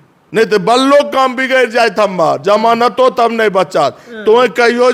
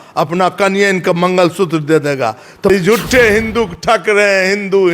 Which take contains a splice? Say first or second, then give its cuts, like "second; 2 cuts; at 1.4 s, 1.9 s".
second; 1 cut; at 2.7 s